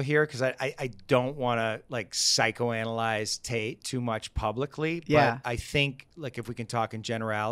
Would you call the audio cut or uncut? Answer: uncut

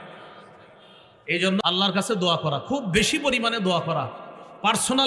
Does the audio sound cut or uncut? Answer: cut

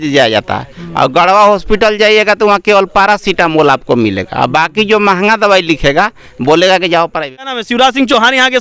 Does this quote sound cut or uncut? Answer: cut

